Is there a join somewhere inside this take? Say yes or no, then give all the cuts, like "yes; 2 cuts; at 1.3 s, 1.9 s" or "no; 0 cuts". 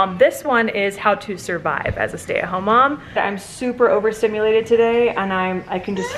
yes; 1 cut; at 3.2 s